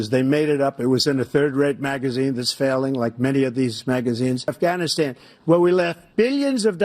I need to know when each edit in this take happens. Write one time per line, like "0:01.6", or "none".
0:04.5